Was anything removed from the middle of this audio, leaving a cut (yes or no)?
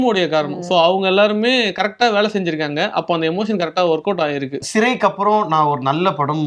yes